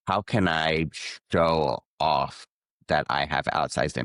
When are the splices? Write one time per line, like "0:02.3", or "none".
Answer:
none